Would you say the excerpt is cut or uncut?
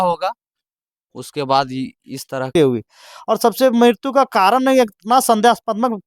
cut